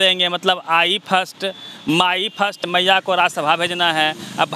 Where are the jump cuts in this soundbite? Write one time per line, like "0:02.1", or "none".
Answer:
0:02.6